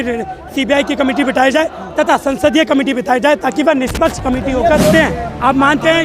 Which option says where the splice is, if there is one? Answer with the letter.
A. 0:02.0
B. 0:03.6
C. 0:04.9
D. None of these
C